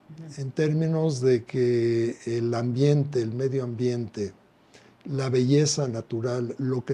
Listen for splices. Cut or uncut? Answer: uncut